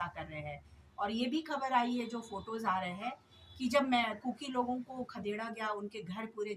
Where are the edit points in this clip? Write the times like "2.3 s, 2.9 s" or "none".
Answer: none